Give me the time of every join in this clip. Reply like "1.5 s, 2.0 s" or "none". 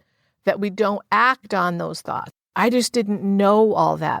2.4 s